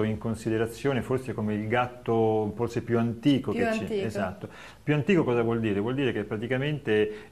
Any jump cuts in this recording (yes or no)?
yes